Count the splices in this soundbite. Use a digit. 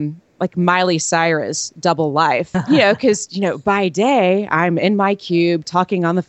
1